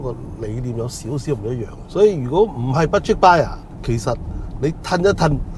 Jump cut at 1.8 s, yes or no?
yes